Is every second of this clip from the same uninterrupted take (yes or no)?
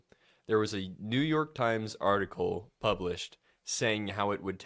yes